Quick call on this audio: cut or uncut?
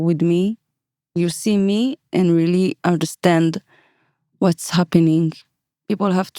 cut